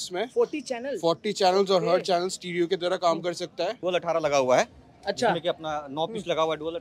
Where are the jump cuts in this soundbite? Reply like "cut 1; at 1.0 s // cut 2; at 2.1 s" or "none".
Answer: cut 1; at 3.8 s